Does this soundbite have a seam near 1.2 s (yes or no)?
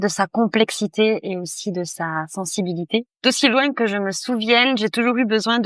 no